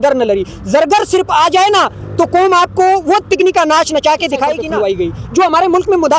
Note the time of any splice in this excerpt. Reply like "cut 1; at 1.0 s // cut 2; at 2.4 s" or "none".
cut 1; at 4.6 s